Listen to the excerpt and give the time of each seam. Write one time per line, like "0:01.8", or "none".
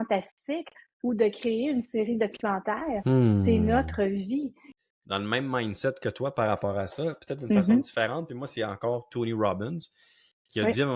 0:04.6